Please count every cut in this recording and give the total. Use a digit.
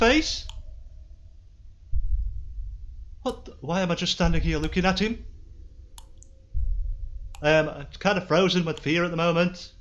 0